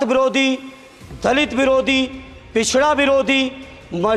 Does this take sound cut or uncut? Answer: uncut